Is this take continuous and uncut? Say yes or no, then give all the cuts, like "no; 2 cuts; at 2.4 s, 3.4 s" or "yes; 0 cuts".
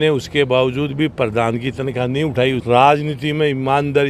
no; 1 cut; at 2.6 s